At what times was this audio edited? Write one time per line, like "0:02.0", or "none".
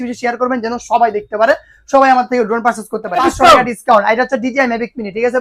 0:03.2